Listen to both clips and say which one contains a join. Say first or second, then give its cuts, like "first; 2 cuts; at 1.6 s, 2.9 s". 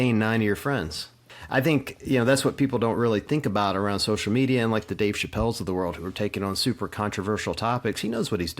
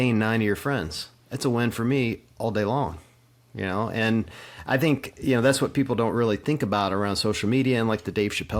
first; 1 cut; at 1.2 s